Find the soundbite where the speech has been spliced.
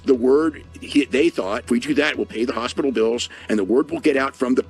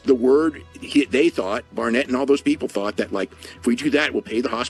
first; 1 cut; at 1.6 s

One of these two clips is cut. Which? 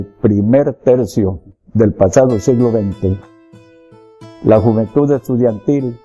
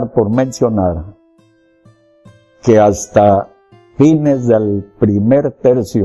first; 1 cut; at 4.8 s

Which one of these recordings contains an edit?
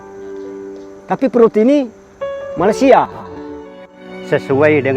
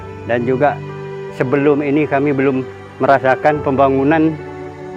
first; 1 cut; at 3.3 s

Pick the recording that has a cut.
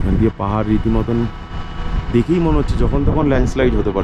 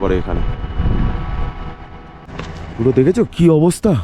second; 1 cut; at 2.2 s

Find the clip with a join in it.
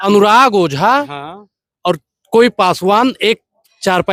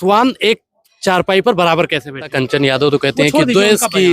second; 1 cut; at 2.2 s

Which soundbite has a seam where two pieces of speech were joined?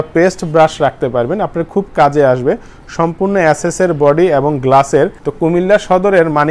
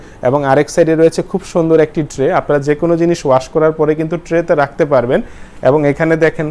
first; 1 cut; at 5.2 s

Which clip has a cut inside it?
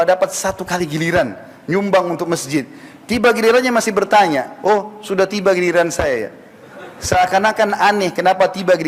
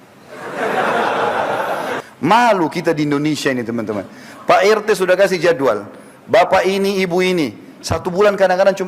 second; 1 cut; at 1.9 s

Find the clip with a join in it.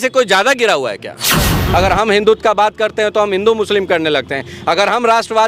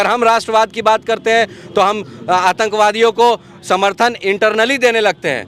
first; 1 cut; at 1.5 s

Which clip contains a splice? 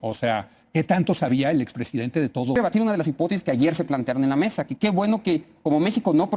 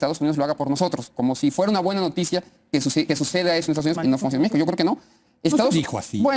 first; 1 cut; at 2.5 s

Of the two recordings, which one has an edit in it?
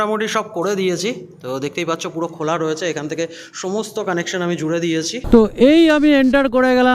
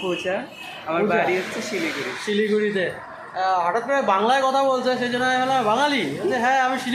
first; 1 cut; at 5.2 s

